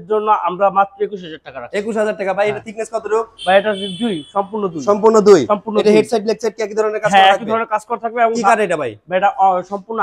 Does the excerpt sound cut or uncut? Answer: uncut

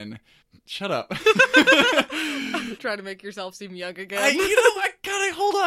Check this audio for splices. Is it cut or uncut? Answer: cut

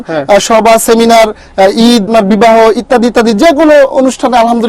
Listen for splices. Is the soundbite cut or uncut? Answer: cut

